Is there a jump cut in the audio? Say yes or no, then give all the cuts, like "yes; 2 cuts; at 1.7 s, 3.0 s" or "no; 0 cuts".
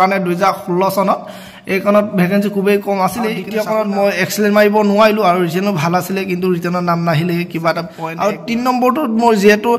yes; 2 cuts; at 3.5 s, 8.0 s